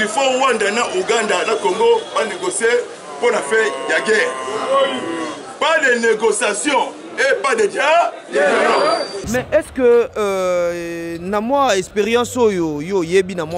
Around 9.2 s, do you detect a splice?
yes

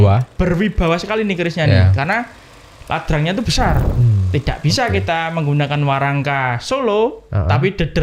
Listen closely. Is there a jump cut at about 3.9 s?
yes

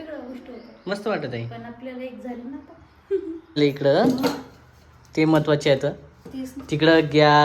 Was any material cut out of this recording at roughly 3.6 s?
yes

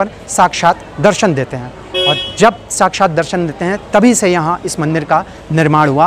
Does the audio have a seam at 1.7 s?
yes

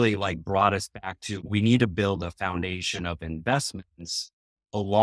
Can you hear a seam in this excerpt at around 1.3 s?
yes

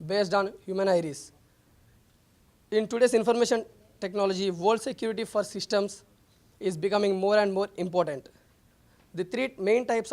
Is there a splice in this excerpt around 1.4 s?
no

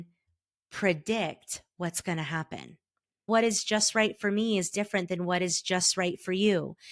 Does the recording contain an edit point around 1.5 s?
no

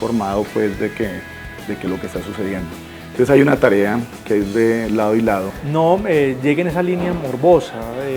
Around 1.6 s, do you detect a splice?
no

